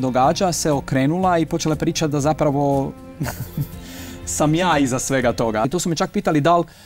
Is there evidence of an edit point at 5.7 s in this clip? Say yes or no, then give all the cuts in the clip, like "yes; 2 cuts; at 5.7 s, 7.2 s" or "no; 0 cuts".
yes; 1 cut; at 5.7 s